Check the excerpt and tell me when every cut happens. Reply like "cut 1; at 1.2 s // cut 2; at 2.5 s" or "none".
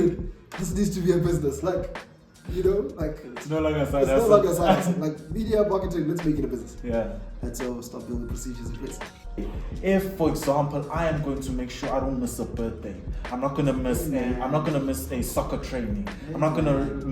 cut 1; at 9.4 s